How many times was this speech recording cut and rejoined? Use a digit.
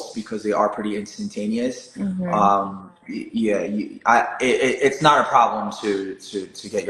0